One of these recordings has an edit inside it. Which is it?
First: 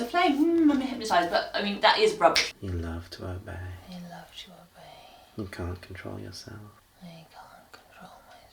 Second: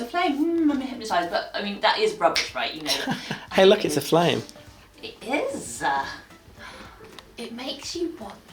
first; 3 cuts; at 2.5 s, 3.8 s, 6.8 s

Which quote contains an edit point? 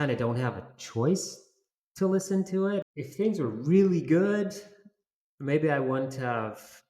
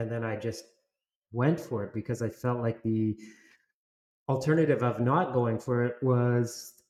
first; 1 cut; at 2.8 s

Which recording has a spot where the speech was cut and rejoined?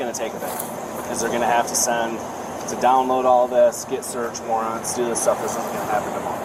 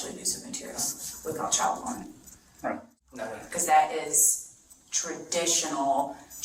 second; 1 cut; at 2.9 s

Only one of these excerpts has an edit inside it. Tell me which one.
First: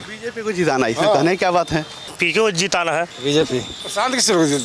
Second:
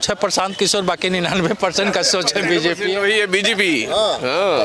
first; 3 cuts; at 2.0 s, 3.1 s, 3.8 s

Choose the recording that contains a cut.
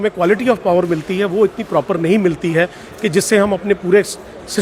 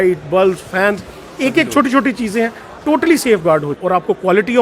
second; 1 cut; at 3.7 s

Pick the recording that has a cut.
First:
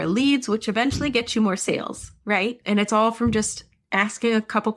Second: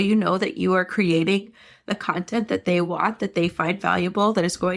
first; 1 cut; at 2.6 s

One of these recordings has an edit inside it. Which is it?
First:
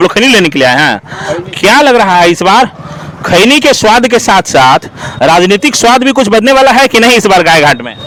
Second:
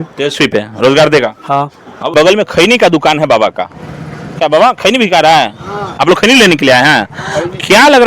second; 1 cut; at 2.1 s

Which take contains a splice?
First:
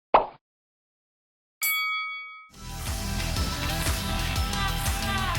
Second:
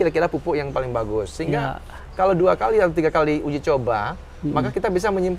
first; 1 cut; at 2.5 s

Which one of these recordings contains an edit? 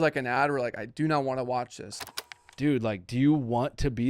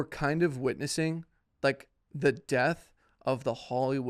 first; 1 cut; at 2.0 s

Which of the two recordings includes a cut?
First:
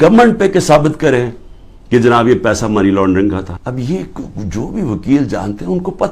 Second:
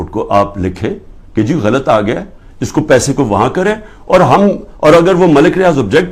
first; 1 cut; at 3.6 s

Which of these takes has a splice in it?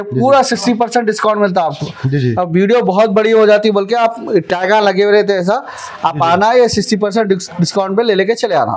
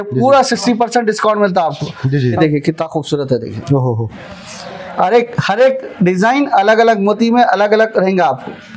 second; 1 cut; at 2.4 s

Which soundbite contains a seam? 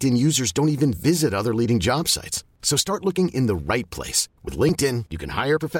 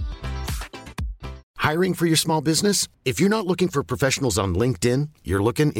second; 1 cut; at 1.4 s

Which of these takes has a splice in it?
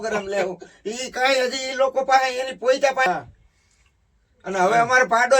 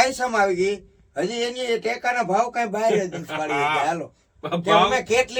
first; 1 cut; at 3.1 s

